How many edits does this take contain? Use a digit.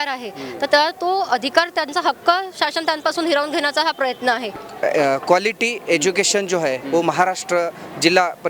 1